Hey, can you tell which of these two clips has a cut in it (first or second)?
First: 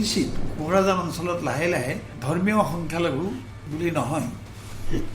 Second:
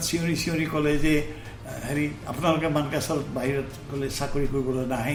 first